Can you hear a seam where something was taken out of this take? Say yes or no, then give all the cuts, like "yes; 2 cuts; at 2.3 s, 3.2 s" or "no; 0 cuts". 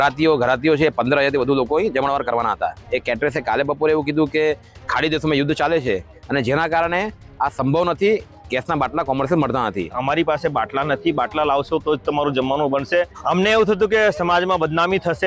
yes; 3 cuts; at 2.8 s, 10.0 s, 13.2 s